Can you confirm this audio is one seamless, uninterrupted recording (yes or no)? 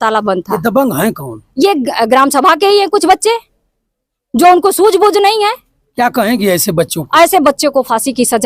yes